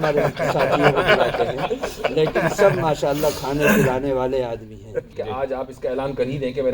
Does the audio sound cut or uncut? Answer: cut